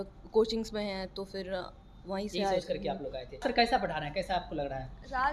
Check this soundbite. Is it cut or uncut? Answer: cut